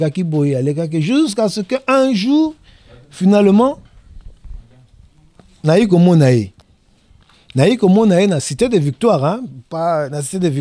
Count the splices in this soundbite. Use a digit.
0